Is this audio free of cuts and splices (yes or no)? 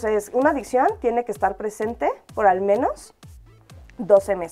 yes